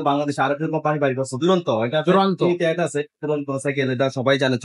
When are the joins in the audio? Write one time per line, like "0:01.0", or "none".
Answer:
none